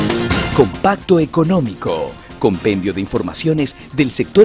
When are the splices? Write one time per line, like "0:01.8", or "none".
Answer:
none

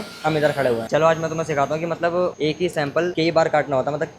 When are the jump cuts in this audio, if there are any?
0:02.4

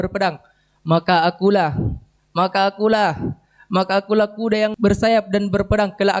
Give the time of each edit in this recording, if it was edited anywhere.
0:04.7

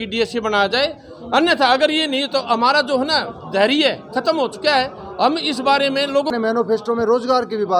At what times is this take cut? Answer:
0:06.3

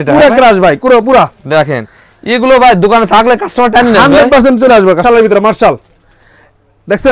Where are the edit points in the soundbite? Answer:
0:05.0

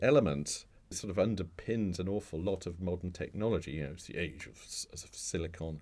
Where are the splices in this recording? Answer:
0:01.0

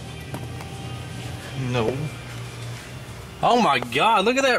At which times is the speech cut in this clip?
none

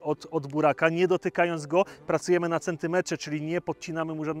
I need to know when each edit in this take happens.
none

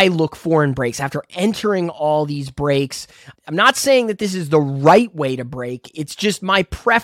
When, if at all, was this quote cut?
none

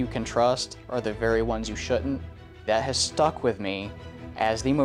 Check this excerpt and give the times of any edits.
none

